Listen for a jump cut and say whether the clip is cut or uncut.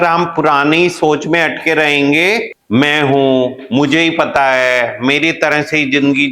cut